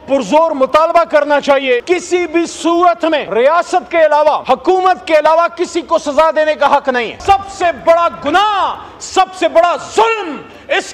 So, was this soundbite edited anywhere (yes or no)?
yes